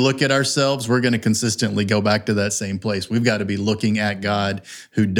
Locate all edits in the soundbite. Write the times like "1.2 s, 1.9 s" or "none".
none